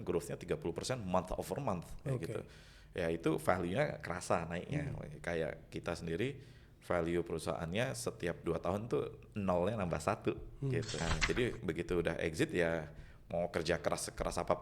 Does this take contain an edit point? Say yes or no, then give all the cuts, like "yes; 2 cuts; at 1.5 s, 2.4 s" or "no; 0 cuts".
yes; 1 cut; at 11.0 s